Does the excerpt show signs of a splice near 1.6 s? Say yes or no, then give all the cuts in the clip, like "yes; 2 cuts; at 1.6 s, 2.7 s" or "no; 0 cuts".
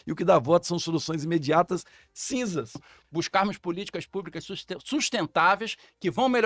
no; 1 cut; at 2.9 s